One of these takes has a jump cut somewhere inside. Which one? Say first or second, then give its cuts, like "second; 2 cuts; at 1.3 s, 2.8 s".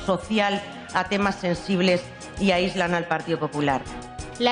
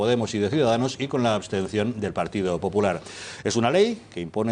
first; 1 cut; at 1.4 s